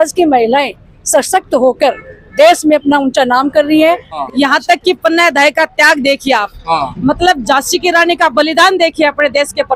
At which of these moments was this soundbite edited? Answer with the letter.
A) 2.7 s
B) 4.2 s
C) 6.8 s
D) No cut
B